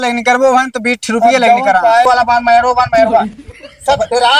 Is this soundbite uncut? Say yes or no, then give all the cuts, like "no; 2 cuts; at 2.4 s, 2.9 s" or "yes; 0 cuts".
no; 1 cut; at 2.0 s